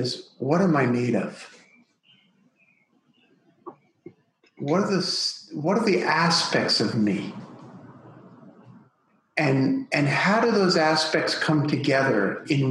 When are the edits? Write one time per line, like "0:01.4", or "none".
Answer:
none